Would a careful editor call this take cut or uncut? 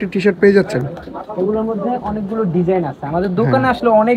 uncut